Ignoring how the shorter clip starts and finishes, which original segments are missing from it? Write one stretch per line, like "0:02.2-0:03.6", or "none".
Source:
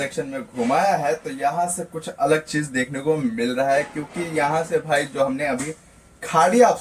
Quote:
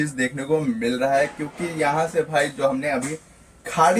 none